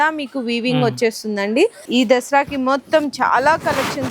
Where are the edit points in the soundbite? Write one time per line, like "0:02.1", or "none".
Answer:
0:01.8